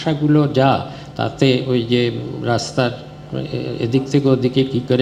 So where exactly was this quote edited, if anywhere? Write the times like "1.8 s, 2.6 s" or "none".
none